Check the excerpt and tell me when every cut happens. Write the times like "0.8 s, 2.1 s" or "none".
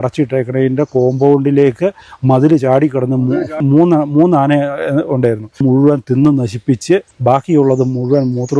3.6 s, 5.6 s, 7.1 s